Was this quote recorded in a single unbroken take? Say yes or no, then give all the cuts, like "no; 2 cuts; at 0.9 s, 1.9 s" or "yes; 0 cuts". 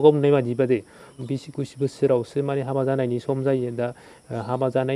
no; 1 cut; at 1.2 s